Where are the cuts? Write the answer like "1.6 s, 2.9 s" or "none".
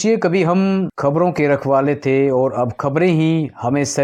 0.9 s